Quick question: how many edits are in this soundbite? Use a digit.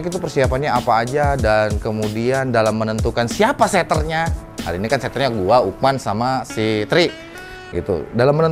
0